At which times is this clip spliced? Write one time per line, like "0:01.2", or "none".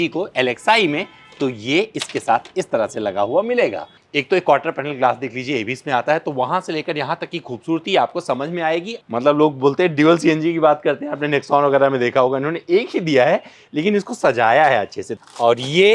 0:03.9
0:08.9
0:15.1